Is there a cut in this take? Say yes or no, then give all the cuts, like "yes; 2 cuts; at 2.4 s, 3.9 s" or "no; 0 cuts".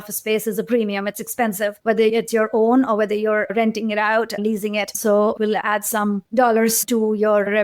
yes; 1 cut; at 5.4 s